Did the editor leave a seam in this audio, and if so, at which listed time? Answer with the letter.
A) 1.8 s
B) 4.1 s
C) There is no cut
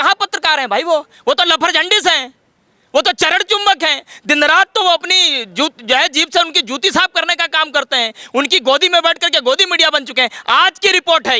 C